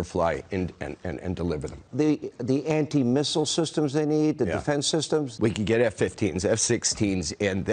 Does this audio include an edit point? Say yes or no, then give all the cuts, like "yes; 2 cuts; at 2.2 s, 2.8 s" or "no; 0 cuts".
yes; 2 cuts; at 1.8 s, 5.3 s